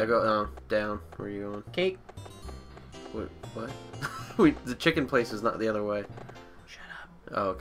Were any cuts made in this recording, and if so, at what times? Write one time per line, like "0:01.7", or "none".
0:04.5